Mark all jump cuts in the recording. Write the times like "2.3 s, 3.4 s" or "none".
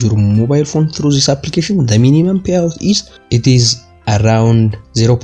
3.1 s